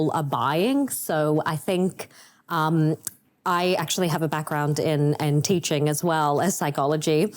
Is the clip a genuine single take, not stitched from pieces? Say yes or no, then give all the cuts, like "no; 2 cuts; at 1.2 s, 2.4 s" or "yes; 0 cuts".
yes; 0 cuts